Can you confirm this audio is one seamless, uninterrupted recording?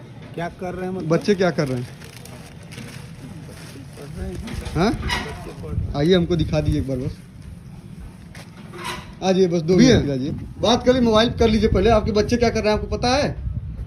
yes; 0 cuts

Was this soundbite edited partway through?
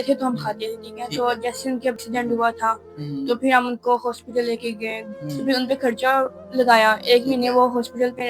yes; 2 cuts; at 2.0 s, 5.0 s

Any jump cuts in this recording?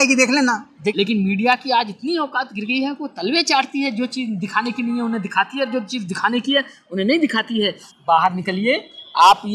yes; 2 cuts; at 0.9 s, 7.9 s

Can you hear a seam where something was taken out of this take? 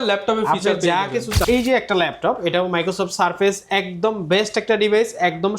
yes; 1 cut; at 1.4 s

